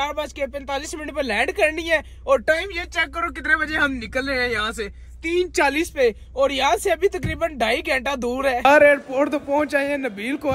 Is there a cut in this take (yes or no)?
yes